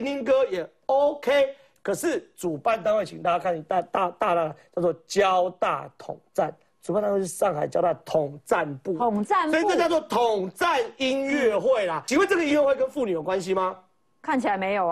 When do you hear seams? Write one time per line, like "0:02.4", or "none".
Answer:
0:12.0